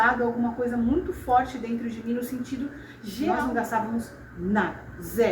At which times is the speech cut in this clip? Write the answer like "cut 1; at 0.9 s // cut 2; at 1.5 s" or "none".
cut 1; at 3.2 s